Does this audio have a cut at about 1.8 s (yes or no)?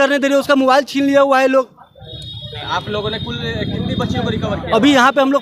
no